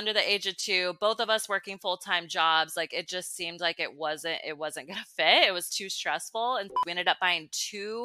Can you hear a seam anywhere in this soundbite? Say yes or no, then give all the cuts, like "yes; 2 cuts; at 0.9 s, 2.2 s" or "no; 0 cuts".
yes; 1 cut; at 6.7 s